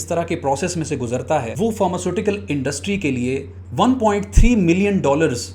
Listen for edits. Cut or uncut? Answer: cut